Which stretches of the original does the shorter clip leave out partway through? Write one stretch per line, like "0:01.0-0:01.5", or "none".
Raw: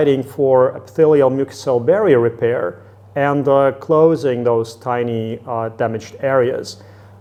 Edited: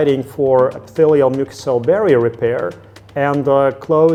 none